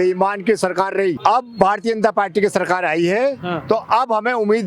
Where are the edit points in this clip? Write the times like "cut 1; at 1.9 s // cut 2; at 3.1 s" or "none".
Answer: cut 1; at 1.2 s